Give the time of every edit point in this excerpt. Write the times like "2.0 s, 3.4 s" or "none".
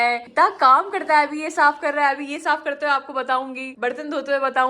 3.6 s